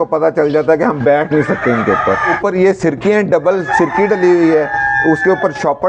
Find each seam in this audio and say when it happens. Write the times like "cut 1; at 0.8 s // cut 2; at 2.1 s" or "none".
cut 1; at 2.4 s